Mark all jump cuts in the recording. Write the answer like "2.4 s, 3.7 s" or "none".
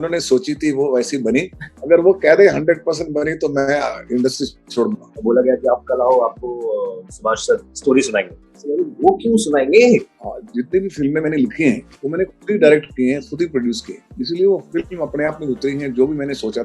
5.1 s, 10.1 s